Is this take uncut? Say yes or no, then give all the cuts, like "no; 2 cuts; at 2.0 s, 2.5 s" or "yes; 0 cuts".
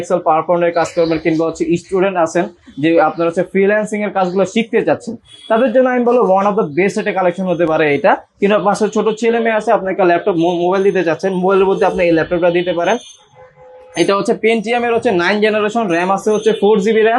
yes; 0 cuts